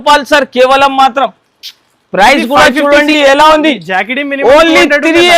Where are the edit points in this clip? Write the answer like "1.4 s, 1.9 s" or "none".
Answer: 3.1 s